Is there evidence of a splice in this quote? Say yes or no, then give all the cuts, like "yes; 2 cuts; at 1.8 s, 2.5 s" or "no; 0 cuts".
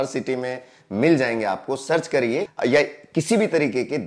yes; 1 cut; at 2.5 s